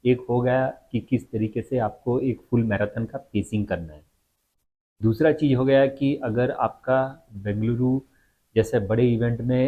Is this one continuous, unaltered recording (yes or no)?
yes